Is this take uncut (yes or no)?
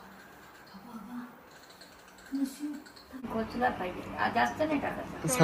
no